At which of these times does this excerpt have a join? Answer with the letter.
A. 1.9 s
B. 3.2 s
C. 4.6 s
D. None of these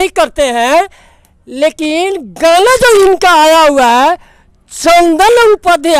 D